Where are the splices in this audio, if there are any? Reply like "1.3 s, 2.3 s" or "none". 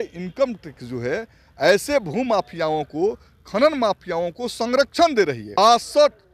5.4 s